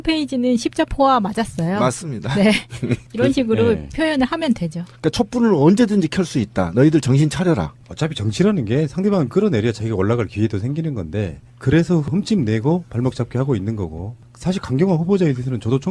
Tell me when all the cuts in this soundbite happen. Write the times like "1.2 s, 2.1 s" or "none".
none